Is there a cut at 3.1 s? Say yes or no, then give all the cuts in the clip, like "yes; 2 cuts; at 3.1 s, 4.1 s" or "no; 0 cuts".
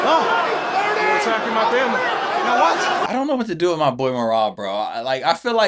yes; 1 cut; at 3.1 s